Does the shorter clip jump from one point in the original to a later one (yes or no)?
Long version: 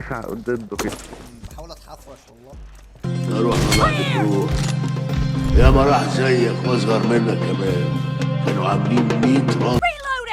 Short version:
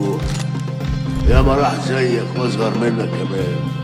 no